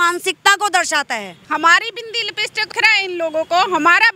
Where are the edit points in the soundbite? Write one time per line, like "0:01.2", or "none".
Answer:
0:01.4
0:02.6